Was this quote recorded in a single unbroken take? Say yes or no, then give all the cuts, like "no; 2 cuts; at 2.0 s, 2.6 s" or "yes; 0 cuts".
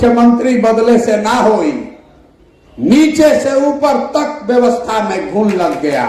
yes; 0 cuts